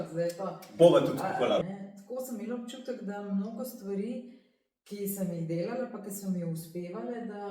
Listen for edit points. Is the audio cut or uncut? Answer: cut